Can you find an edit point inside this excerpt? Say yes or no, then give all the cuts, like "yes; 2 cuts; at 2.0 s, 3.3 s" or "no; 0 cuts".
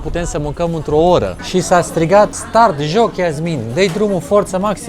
yes; 2 cuts; at 1.4 s, 2.4 s